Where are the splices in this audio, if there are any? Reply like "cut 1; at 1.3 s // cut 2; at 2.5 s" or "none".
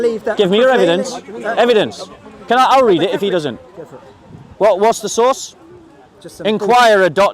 none